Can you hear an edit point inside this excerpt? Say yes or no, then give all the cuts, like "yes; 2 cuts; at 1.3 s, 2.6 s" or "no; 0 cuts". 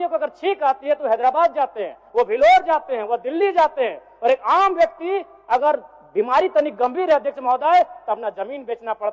no; 0 cuts